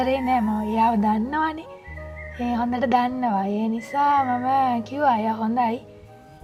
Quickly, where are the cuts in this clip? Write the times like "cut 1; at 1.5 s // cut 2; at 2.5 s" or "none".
none